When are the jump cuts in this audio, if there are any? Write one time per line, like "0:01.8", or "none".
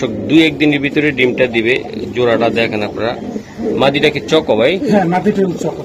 none